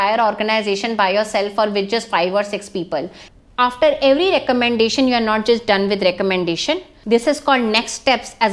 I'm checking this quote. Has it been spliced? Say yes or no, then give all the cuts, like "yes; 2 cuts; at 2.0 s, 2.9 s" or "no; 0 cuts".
yes; 2 cuts; at 3.2 s, 6.9 s